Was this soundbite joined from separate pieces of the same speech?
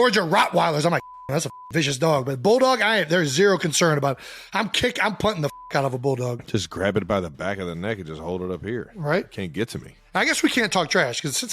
yes; 2 cuts; at 6.4 s, 9.9 s

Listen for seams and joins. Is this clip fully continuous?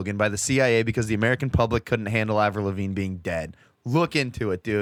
yes; 0 cuts

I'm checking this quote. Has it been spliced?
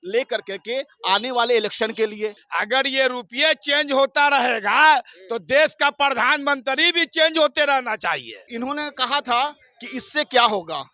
yes; 2 cuts; at 2.4 s, 8.4 s

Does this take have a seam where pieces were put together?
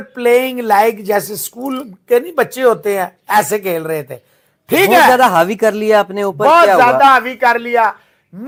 no; 0 cuts

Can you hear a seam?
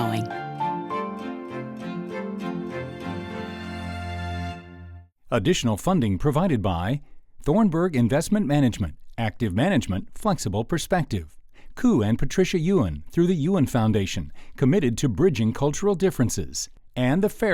no; 0 cuts

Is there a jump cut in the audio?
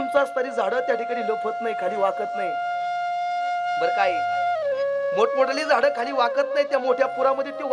no; 0 cuts

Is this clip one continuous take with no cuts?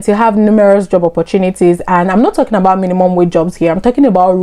yes; 0 cuts

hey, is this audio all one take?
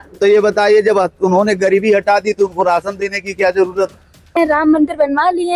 no; 1 cut; at 4.3 s

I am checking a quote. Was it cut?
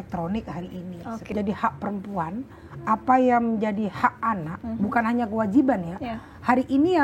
yes; 1 cut; at 1.3 s

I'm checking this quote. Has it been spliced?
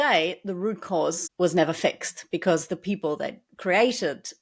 yes; 1 cut; at 1.2 s

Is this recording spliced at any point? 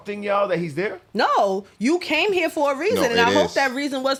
no; 0 cuts

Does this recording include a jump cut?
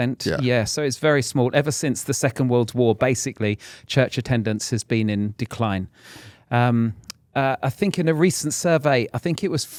no; 0 cuts

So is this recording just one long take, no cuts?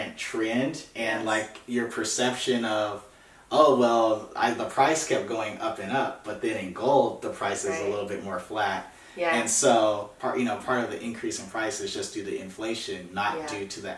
no; 1 cut; at 10.1 s

